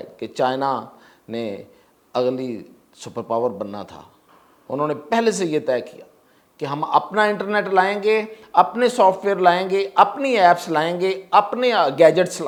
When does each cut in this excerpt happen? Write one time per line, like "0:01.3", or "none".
none